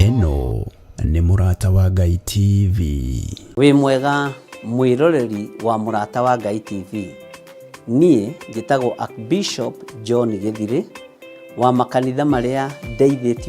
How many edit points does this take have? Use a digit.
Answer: 1